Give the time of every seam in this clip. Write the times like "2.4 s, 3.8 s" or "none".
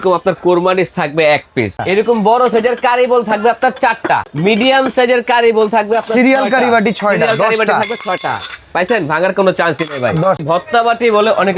1.8 s, 4.3 s, 10.4 s